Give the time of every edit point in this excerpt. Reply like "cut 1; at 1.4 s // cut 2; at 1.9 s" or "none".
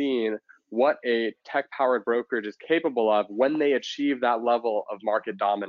none

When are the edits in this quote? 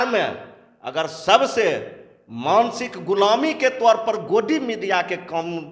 none

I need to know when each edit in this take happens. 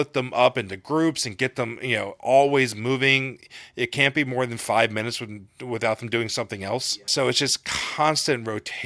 cut 1; at 7.1 s

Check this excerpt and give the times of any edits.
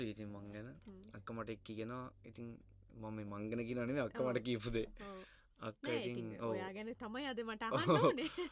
none

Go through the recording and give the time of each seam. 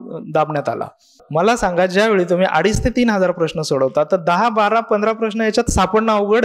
cut 1; at 1.2 s

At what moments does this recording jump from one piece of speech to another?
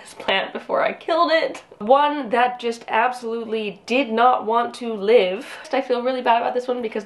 cut 1; at 1.8 s // cut 2; at 5.7 s

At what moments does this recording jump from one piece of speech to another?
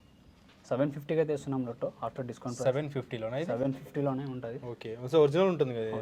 none

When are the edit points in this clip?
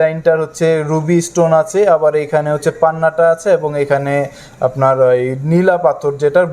none

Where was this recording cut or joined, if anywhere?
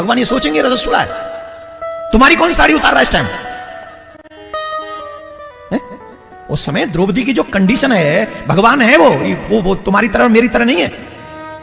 none

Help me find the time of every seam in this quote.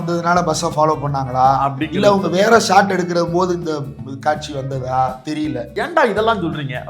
cut 1; at 5.7 s

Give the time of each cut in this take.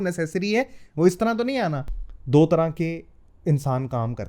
cut 1; at 1.9 s

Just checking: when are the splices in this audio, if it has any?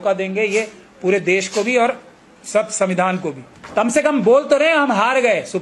cut 1; at 3.5 s

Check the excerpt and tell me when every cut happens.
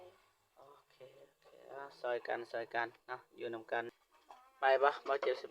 cut 1; at 3.9 s

